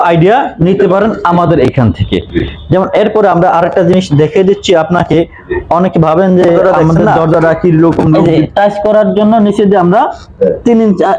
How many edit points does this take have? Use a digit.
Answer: 1